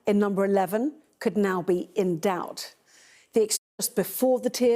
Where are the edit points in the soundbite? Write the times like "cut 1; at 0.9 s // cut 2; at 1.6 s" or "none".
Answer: cut 1; at 3.7 s